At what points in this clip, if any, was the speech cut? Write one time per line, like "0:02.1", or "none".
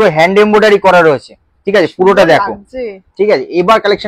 none